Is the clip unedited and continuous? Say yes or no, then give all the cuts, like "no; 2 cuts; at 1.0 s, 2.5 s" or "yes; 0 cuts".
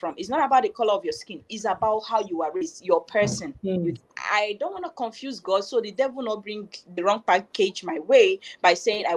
no; 1 cut; at 4.2 s